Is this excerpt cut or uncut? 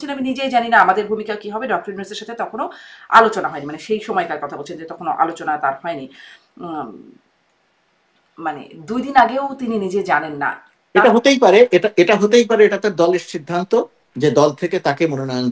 uncut